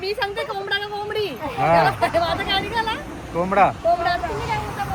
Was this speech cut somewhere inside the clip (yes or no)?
no